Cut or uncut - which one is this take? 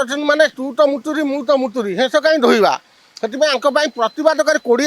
uncut